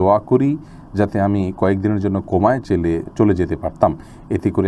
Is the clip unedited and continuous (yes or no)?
yes